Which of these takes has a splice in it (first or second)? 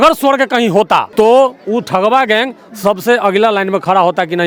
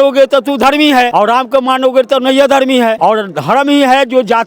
second